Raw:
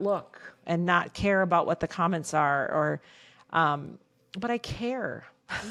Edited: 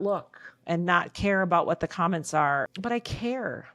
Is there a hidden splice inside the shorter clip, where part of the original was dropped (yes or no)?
yes